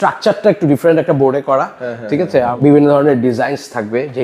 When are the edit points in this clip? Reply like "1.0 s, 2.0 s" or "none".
2.5 s